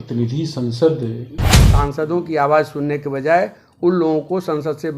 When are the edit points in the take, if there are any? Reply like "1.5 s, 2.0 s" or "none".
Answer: 1.6 s